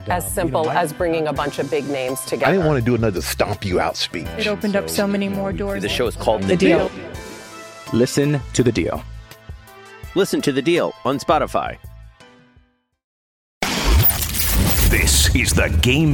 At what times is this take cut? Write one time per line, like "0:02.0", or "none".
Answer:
0:13.5